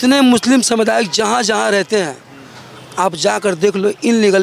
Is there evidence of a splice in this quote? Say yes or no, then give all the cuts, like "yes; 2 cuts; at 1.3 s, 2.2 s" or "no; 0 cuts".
no; 0 cuts